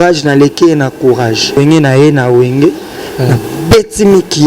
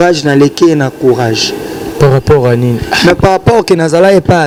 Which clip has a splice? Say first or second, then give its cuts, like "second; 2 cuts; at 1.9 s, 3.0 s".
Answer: first; 1 cut; at 1.5 s